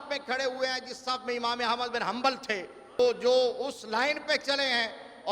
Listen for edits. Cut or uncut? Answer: cut